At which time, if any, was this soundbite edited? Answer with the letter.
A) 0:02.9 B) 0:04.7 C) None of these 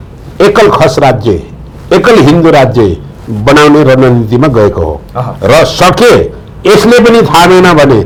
C